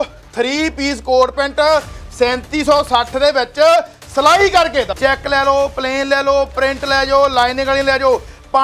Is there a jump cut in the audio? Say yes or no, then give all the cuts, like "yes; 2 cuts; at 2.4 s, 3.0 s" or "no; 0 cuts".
no; 0 cuts